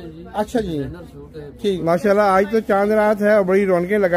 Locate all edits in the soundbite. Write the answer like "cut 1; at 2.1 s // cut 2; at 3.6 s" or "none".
cut 1; at 1.8 s